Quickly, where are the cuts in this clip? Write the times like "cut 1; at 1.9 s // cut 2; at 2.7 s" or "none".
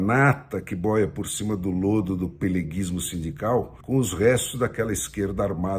cut 1; at 3.8 s